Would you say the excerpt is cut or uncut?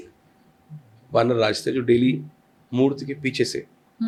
uncut